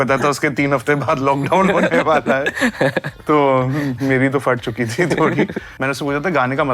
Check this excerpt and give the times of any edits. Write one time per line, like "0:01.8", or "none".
0:05.7

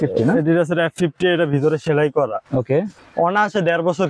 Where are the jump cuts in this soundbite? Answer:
0:03.0

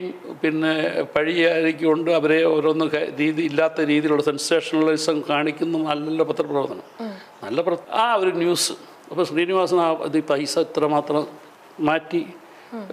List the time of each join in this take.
0:07.8

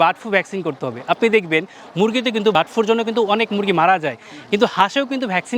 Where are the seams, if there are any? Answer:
0:02.5

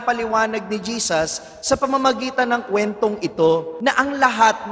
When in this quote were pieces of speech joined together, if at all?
0:03.7

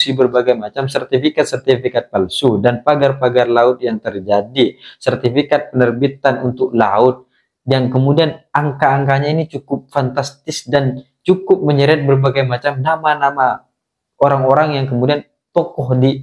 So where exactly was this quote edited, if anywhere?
none

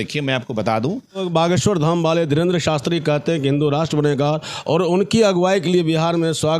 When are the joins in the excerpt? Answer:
0:01.2

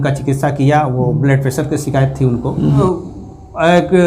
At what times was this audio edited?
0:02.8

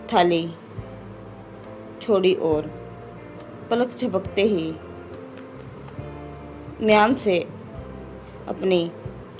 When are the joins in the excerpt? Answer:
none

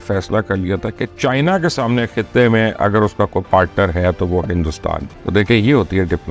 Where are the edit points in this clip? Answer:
0:05.1

